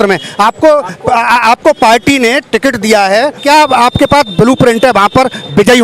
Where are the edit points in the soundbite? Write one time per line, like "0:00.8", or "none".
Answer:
0:03.4